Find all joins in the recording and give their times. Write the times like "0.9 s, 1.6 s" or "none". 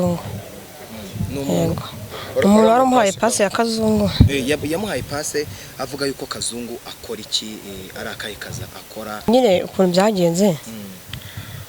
9.3 s